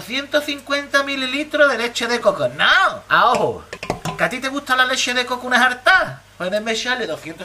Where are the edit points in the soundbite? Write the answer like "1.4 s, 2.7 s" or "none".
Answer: 3.7 s